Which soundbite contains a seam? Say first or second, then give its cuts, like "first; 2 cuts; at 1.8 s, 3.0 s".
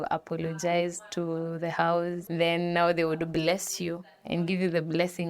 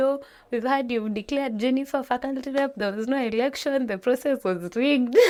first; 1 cut; at 2.3 s